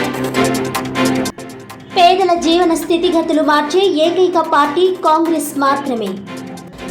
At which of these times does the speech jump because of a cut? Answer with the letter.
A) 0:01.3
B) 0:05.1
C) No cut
A